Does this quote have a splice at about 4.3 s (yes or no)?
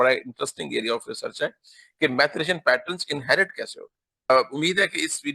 yes